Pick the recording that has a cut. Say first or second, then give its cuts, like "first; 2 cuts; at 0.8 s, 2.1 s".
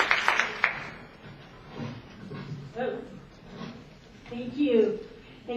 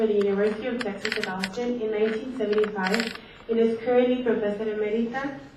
first; 1 cut; at 2.4 s